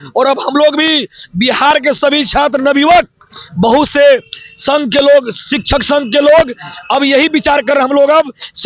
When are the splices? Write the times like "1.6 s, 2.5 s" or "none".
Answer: none